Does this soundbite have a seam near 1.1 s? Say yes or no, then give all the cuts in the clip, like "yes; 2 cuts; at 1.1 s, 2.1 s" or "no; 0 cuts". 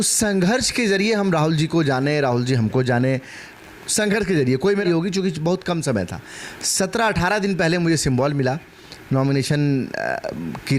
no; 1 cut; at 4.8 s